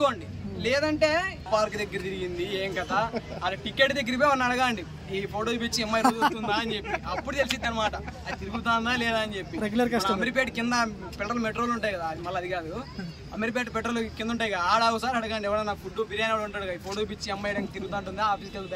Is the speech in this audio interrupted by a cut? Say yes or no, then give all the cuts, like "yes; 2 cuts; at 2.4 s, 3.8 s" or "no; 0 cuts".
yes; 1 cut; at 1.4 s